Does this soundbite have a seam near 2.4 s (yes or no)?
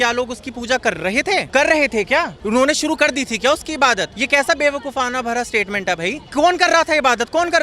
yes